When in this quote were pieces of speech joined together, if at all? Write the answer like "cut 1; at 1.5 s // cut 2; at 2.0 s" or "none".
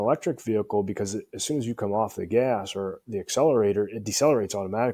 none